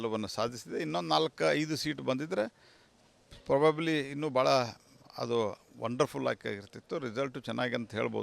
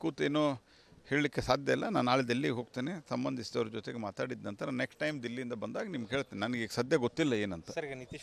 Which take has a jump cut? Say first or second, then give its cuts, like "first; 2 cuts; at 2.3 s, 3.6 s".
first; 1 cut; at 3.8 s